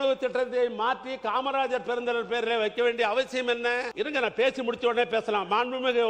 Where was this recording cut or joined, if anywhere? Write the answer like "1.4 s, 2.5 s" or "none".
3.9 s